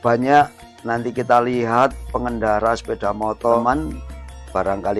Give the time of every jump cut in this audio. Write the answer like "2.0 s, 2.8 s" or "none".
3.6 s

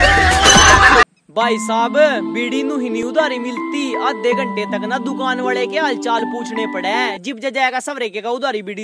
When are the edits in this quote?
0.9 s

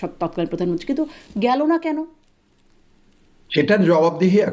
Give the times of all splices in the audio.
none

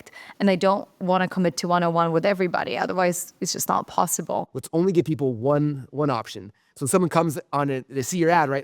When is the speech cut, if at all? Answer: 4.6 s

